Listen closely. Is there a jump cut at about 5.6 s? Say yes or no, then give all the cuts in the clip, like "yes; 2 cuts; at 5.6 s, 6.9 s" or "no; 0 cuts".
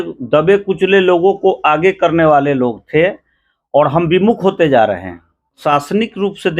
yes; 1 cut; at 5.6 s